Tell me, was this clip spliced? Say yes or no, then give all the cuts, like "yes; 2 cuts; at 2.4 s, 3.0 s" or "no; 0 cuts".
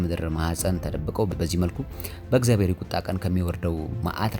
yes; 1 cut; at 1.3 s